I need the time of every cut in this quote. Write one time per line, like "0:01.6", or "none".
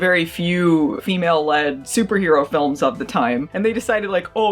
none